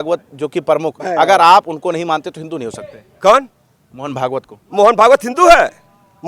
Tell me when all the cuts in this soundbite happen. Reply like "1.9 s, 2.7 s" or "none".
none